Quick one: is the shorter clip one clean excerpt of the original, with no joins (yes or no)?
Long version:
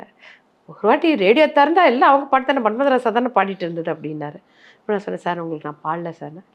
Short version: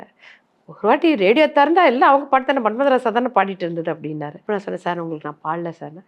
no